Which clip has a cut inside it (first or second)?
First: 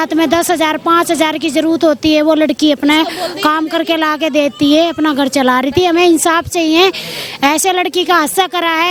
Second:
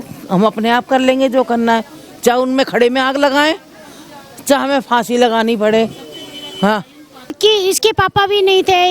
second